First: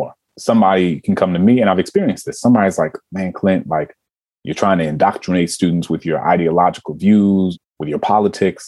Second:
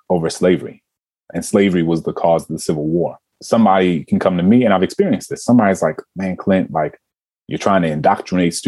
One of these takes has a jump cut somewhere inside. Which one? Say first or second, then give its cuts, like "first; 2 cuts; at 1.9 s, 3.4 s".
first; 1 cut; at 7.6 s